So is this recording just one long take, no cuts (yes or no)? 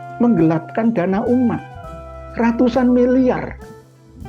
yes